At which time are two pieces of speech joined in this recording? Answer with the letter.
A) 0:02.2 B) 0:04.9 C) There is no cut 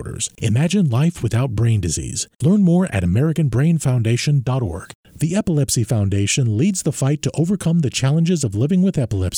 B